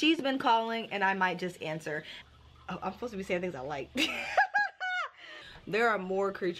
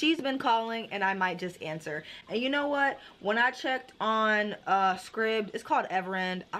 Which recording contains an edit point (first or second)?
first